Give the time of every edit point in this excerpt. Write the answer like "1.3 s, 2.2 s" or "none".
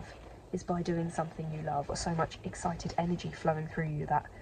2.0 s